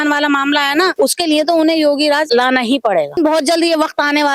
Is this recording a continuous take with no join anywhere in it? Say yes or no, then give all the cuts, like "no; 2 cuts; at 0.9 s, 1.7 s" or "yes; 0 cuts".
no; 3 cuts; at 0.9 s, 2.2 s, 3.2 s